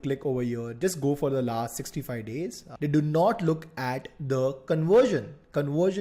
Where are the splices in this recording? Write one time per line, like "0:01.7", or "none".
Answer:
0:02.6